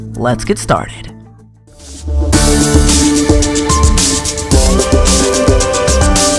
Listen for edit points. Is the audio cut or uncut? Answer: uncut